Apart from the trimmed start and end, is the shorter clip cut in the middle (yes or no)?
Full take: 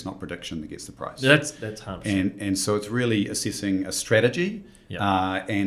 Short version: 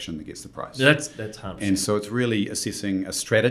yes